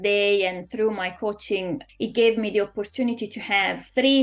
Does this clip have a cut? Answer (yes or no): yes